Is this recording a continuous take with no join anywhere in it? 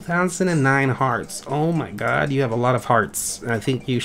yes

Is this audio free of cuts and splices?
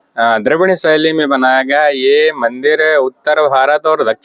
yes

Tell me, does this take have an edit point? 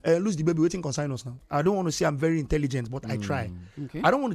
yes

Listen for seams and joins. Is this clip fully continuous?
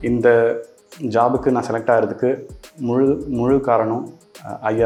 yes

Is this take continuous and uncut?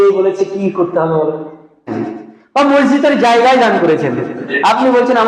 no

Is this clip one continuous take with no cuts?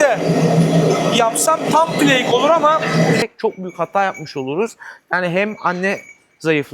no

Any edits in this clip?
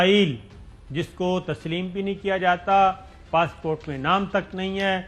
no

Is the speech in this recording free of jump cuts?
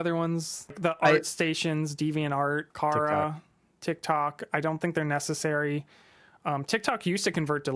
yes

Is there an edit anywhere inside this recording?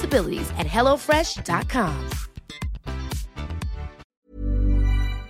yes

